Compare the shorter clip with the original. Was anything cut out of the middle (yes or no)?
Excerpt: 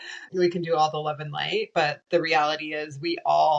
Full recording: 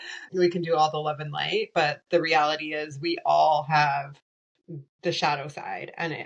no